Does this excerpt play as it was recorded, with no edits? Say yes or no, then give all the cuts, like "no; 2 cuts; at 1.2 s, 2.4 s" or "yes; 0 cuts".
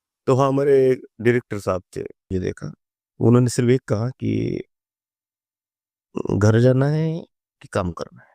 no; 1 cut; at 2.3 s